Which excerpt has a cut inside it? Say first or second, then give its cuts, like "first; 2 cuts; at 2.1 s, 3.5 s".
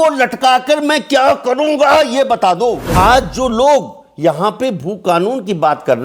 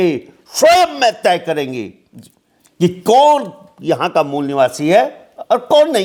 first; 1 cut; at 2.9 s